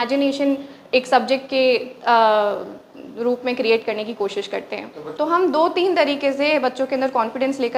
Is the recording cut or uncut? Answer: cut